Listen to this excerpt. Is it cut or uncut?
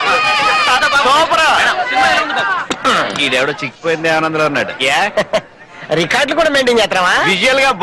uncut